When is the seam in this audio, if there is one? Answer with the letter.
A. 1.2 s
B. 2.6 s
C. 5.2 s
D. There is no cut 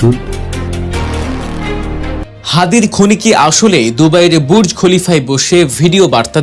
A